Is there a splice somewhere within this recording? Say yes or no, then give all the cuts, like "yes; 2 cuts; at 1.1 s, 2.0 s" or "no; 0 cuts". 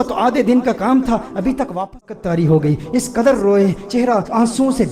yes; 1 cut; at 1.9 s